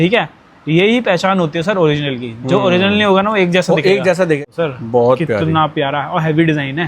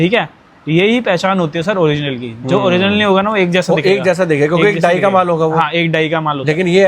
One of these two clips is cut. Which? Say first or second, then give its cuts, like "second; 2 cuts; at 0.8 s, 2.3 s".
first; 1 cut; at 4.4 s